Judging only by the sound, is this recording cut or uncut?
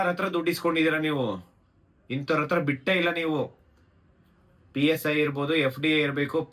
uncut